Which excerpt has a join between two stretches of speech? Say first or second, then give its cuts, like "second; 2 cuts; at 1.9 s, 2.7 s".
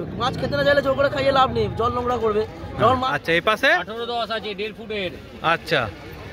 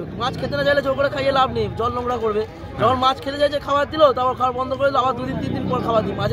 first; 1 cut; at 3.0 s